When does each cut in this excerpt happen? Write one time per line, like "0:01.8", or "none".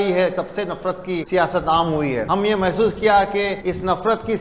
0:01.2
0:02.2
0:03.6